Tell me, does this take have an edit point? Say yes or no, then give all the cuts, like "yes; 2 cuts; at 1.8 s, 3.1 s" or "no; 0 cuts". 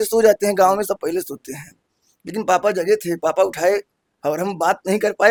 no; 0 cuts